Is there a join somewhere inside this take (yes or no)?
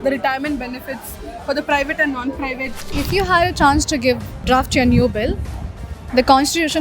yes